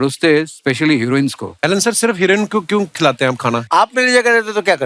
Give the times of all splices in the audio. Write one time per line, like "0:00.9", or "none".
0:01.5
0:03.6